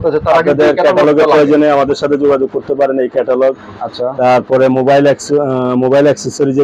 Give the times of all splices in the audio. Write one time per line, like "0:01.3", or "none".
none